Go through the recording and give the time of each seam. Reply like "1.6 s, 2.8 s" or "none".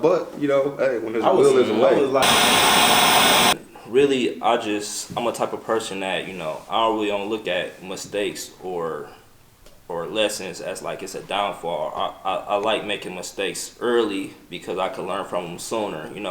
2.2 s, 3.7 s